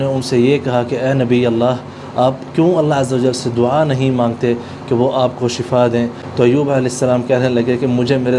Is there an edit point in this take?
no; 0 cuts

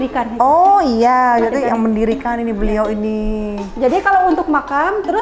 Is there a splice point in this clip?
no; 0 cuts

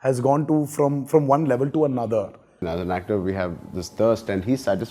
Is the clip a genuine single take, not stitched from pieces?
no; 1 cut; at 2.7 s

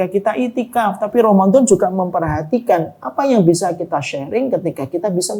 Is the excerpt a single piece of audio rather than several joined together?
yes; 0 cuts

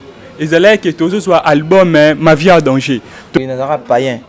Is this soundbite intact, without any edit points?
no; 1 cut; at 3.3 s

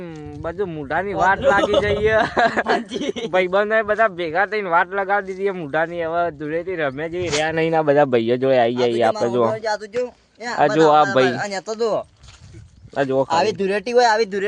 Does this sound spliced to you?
no; 0 cuts

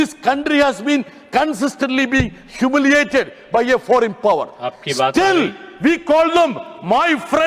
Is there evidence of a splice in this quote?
no; 0 cuts

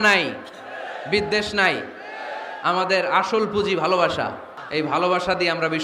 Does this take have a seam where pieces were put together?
yes; 1 cut; at 4.5 s

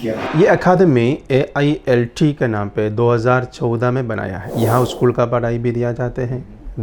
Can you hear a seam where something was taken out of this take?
yes; 1 cut; at 4.4 s

